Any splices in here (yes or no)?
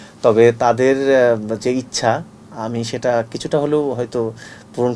no